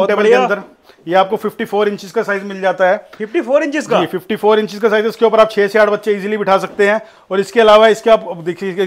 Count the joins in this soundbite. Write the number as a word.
zero